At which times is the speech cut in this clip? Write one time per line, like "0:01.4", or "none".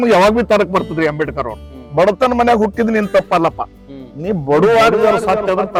none